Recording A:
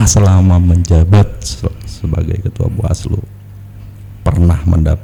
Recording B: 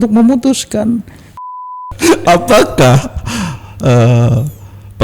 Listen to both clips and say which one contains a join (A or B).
B